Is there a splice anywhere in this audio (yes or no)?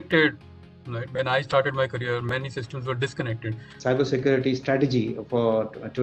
yes